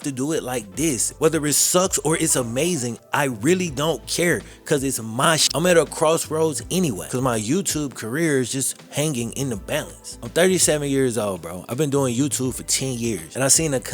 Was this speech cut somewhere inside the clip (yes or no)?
yes